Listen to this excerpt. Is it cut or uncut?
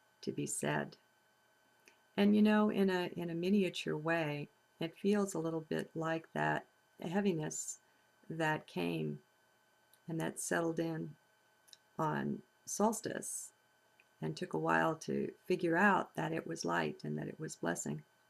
uncut